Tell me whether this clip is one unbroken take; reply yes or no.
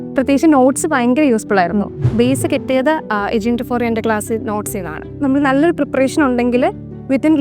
no